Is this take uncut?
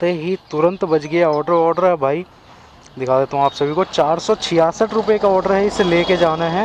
no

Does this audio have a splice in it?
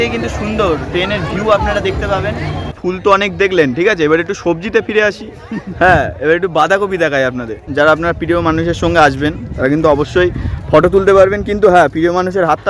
yes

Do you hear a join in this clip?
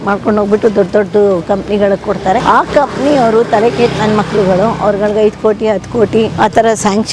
yes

